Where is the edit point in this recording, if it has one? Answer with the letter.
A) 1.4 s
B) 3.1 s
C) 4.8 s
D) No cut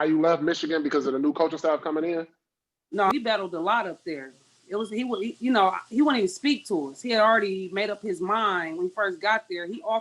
B